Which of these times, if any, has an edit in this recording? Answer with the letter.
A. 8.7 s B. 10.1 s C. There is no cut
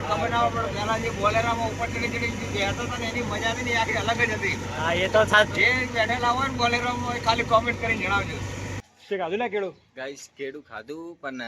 A